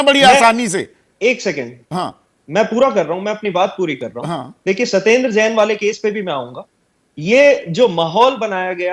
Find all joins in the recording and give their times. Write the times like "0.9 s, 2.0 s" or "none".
none